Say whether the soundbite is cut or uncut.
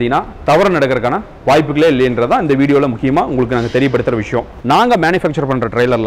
cut